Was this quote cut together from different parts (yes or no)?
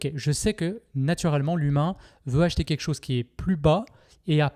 no